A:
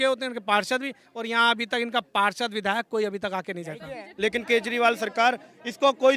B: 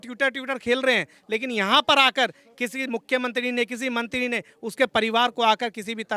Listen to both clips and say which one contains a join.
A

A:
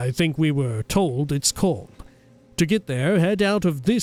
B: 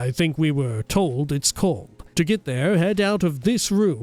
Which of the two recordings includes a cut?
B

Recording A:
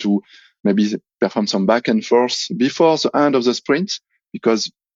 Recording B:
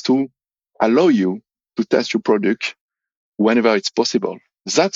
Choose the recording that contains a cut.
B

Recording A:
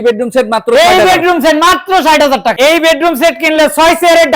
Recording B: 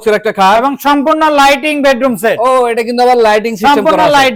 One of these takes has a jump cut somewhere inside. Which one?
A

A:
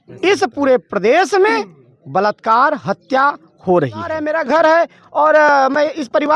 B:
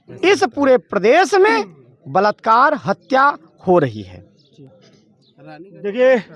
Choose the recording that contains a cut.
A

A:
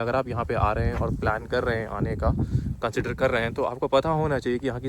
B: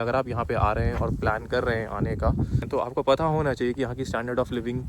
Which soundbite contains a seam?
B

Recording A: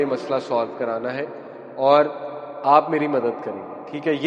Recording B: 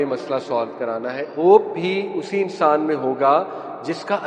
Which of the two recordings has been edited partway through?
B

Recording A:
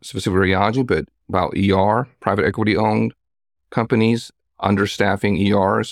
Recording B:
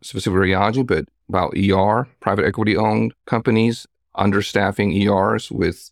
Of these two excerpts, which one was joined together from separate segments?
B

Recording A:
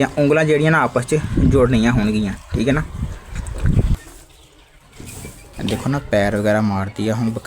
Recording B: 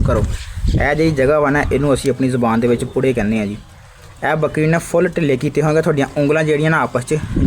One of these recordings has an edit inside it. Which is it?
A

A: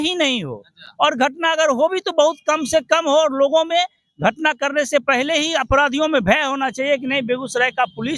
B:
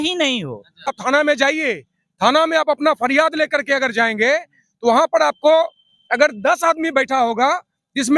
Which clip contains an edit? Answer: B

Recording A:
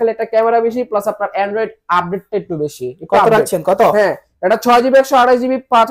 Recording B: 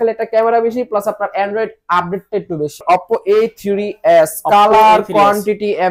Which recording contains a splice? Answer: B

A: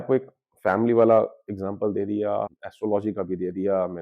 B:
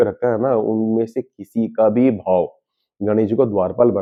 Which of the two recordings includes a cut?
A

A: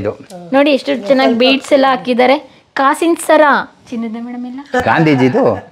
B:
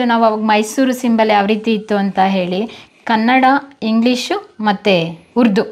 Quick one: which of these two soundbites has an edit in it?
A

